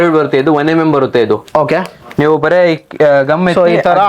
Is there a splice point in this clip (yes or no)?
no